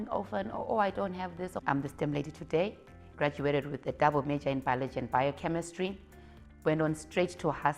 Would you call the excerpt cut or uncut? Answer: cut